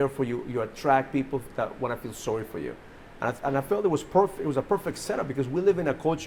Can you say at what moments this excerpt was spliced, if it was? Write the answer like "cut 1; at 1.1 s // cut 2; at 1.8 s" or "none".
none